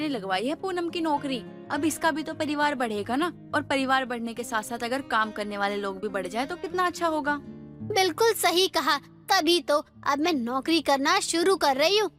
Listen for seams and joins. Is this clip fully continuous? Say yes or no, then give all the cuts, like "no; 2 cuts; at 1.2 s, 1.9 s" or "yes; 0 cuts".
yes; 0 cuts